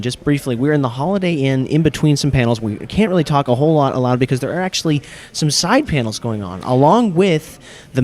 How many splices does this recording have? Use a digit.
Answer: 1